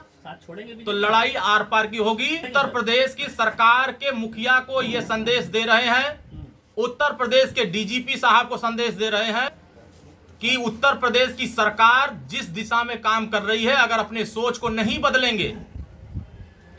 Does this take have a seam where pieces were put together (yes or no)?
yes